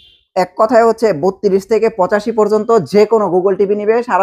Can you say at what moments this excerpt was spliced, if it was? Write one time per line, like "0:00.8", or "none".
none